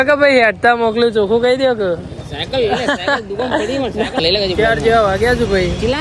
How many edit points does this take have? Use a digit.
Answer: 1